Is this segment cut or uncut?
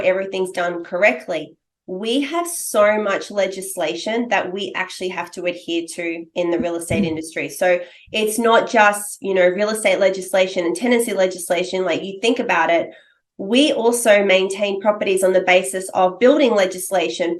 uncut